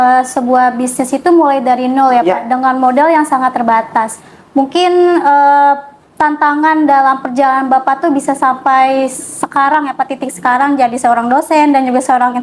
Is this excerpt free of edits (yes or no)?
yes